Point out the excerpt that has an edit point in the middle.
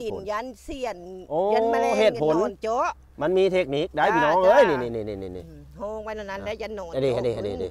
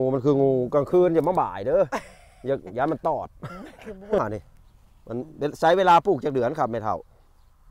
second; 1 cut; at 4.2 s

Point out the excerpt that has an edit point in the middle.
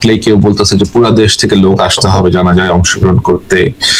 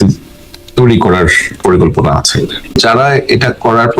second; 1 cut; at 2.7 s

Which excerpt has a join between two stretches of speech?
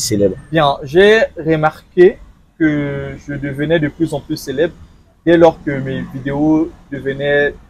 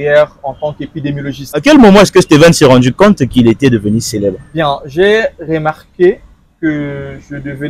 second; 1 cut; at 1.6 s

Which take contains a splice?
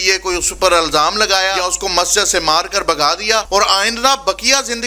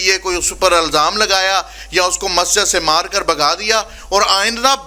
first; 2 cuts; at 1.6 s, 3.5 s

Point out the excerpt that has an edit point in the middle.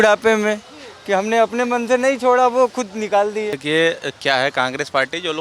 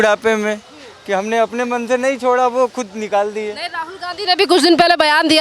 first; 1 cut; at 3.6 s

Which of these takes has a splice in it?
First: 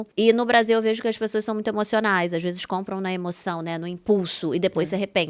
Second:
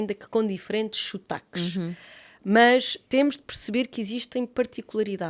second; 1 cut; at 3.0 s

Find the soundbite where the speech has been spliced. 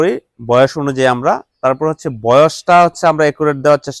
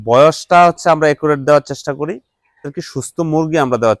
second; 1 cut; at 2.8 s

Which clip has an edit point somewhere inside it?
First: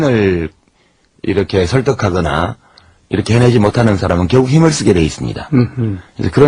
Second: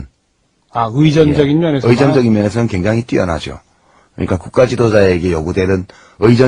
second; 1 cut; at 1.6 s

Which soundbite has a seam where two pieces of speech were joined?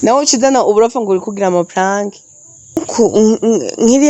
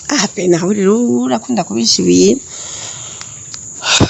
first; 1 cut; at 2.8 s

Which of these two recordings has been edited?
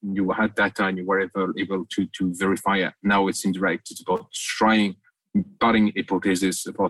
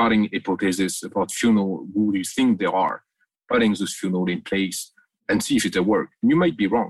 second; 1 cut; at 5.2 s

